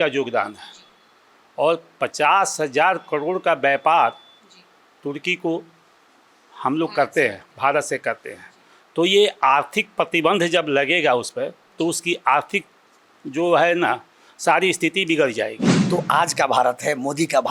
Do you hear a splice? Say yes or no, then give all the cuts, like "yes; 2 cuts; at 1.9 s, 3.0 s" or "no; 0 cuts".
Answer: yes; 1 cut; at 15.7 s